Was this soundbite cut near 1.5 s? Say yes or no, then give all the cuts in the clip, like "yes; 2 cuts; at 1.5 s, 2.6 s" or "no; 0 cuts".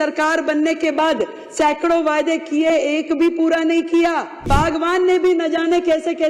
no; 1 cut; at 4.5 s